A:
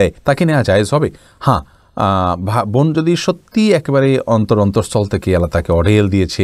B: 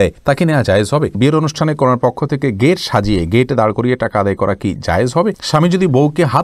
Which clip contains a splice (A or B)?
B